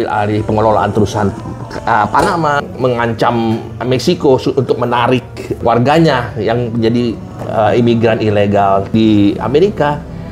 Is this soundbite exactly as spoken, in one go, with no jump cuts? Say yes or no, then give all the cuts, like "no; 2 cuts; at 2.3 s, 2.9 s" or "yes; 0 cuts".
no; 3 cuts; at 2.6 s, 5.6 s, 8.9 s